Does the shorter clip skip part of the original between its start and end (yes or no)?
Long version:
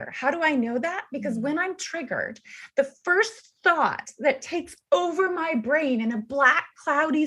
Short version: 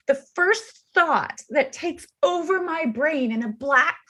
no